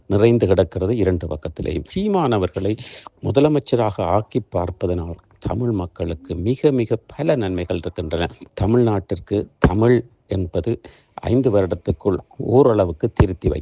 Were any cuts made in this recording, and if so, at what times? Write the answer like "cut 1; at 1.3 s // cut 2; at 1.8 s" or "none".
cut 1; at 1.9 s // cut 2; at 8.4 s